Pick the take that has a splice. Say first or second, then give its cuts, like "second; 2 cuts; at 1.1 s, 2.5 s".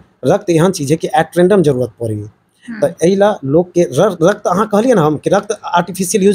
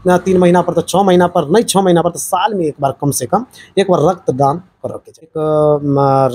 second; 1 cut; at 5.3 s